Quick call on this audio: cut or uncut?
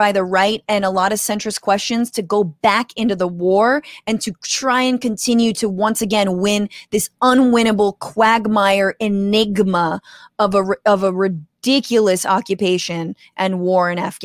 uncut